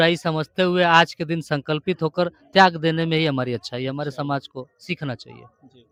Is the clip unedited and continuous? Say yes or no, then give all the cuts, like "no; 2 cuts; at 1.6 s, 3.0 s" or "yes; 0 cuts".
yes; 0 cuts